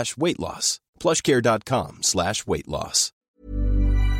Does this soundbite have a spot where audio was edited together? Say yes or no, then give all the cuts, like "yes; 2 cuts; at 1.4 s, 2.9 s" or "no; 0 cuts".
no; 0 cuts